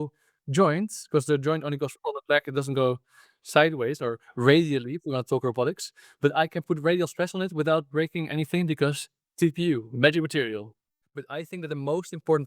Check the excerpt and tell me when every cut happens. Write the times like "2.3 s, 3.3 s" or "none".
11.3 s